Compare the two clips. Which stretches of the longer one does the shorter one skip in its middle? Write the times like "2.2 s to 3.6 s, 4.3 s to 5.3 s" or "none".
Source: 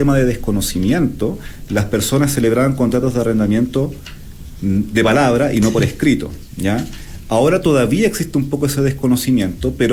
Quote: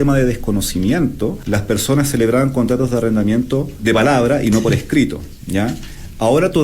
1.4 s to 1.6 s, 4.0 s to 4.9 s

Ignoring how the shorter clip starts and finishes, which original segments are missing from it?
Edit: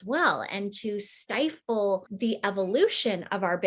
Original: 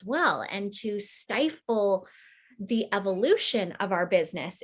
2.1 s to 2.6 s

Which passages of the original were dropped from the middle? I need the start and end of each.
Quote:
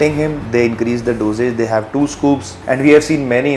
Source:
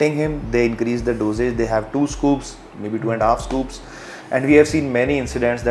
2.5 s to 4.2 s

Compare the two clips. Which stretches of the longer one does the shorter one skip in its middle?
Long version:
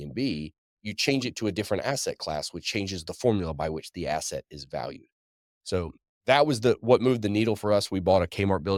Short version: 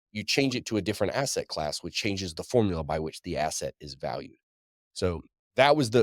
none

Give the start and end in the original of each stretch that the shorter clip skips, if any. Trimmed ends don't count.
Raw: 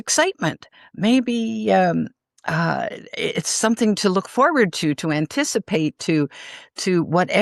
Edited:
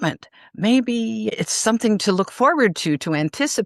1.7 s to 3.3 s

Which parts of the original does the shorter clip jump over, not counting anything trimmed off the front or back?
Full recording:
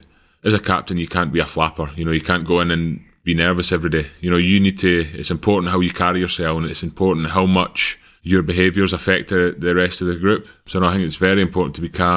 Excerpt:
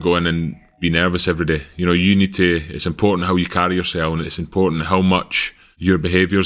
none

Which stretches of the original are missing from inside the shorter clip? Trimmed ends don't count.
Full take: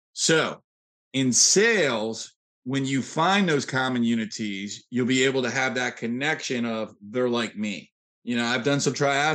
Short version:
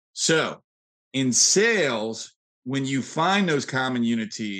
none

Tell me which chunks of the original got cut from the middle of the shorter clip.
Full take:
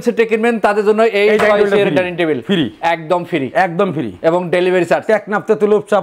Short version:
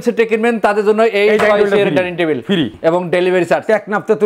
2.7 s to 4.1 s

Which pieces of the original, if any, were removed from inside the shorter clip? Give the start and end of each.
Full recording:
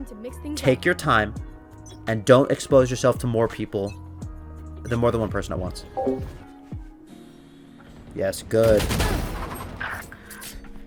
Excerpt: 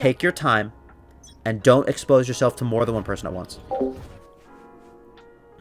3.4 s to 5.1 s

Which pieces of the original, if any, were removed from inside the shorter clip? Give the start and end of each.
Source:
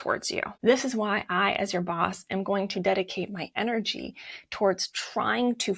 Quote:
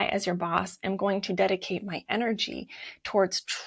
none

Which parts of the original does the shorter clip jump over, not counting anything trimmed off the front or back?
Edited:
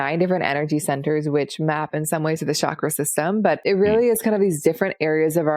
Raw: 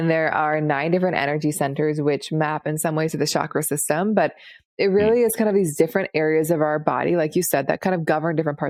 4.3 s to 4.7 s

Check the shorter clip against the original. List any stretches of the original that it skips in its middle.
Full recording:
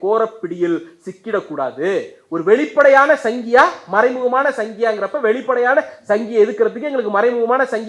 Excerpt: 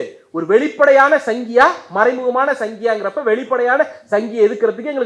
none

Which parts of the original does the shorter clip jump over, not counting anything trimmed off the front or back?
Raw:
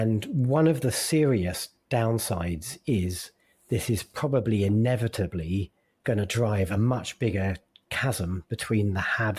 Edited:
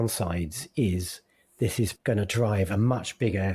4.1 s to 6.0 s

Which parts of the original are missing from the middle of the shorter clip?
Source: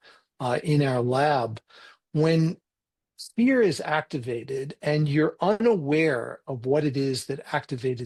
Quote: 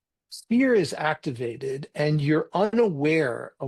none

